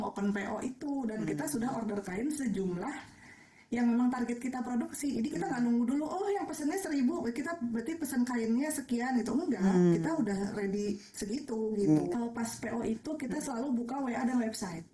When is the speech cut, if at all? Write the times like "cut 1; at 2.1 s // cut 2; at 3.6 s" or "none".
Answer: cut 1; at 12.1 s